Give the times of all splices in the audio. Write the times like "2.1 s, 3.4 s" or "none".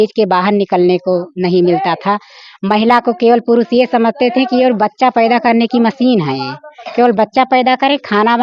none